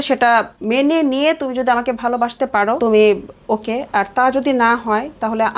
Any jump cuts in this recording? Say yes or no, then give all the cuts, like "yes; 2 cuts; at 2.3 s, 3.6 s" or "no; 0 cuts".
yes; 1 cut; at 2.8 s